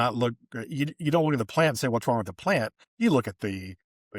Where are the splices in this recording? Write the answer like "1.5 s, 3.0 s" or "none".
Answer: 2.8 s